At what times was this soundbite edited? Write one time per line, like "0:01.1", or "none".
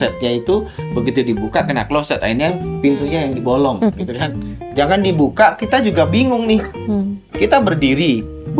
0:04.6